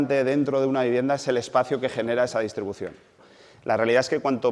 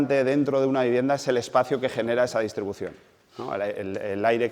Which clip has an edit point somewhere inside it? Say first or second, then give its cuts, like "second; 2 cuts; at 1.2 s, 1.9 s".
first; 1 cut; at 3.3 s